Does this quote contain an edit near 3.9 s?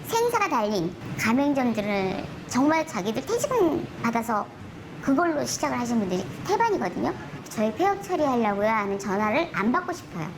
yes; 4 cuts; at 1.1 s, 2.3 s, 3.9 s, 7.4 s

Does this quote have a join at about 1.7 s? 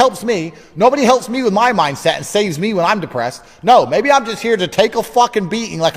no; 1 cut; at 3.4 s

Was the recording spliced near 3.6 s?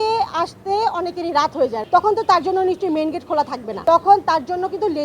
yes; 2 cuts; at 1.8 s, 3.6 s

